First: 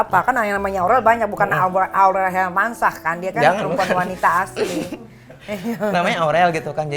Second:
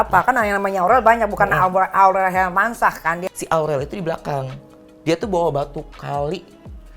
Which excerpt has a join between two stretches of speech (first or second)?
second